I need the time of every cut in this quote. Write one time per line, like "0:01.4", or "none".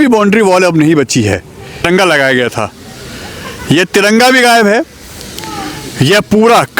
0:01.8